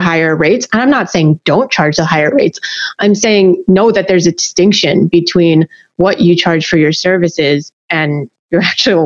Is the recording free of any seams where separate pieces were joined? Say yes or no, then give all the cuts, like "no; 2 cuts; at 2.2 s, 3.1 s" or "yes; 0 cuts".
yes; 0 cuts